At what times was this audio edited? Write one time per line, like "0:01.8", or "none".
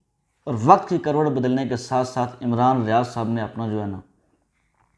none